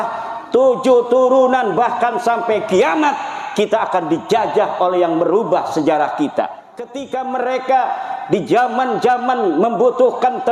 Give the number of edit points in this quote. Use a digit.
1